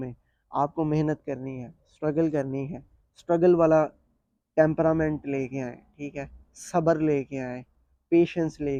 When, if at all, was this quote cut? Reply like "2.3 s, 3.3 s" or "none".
none